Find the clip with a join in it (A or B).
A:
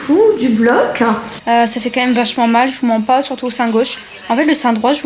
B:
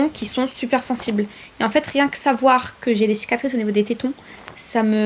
A